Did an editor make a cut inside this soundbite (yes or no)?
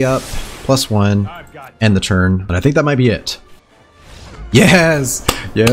yes